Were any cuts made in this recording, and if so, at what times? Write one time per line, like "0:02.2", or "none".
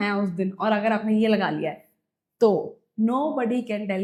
none